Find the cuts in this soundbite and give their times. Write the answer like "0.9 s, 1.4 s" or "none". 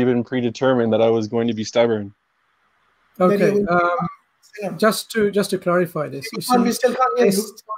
none